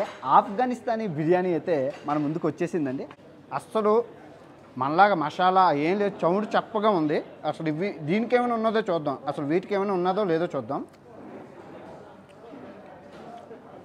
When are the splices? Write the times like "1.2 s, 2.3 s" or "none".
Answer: 3.2 s